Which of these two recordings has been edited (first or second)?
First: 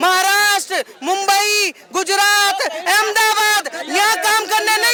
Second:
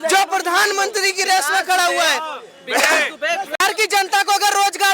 second